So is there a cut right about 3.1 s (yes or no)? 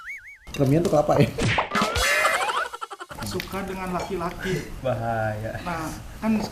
yes